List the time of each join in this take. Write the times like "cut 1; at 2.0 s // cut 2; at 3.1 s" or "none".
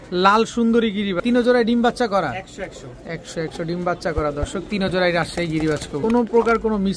cut 1; at 1.2 s // cut 2; at 6.0 s